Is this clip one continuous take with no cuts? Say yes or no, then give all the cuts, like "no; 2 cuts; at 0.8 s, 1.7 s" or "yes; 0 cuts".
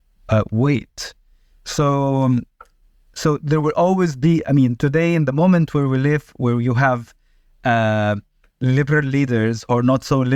yes; 0 cuts